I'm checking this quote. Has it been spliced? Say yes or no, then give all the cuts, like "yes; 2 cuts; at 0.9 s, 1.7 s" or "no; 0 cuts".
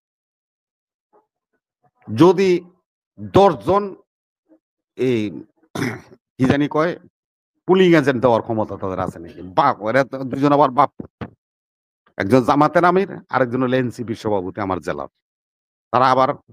no; 0 cuts